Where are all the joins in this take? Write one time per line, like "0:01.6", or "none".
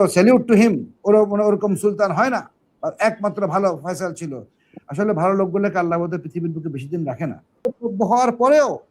0:07.7